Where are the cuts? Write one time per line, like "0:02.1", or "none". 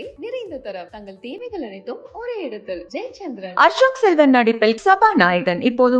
none